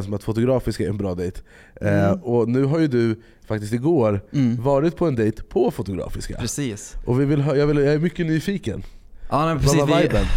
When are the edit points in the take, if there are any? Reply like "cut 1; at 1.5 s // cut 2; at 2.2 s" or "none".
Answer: none